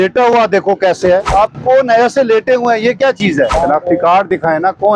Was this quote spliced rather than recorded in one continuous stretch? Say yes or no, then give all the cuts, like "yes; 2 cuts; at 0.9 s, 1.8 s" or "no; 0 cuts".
yes; 2 cuts; at 1.3 s, 3.5 s